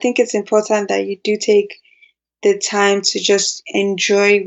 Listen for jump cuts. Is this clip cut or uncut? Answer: uncut